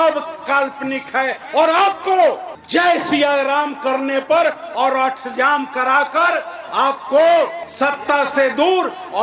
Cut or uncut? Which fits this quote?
uncut